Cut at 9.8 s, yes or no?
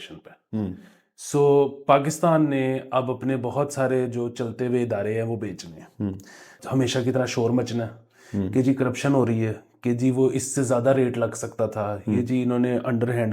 no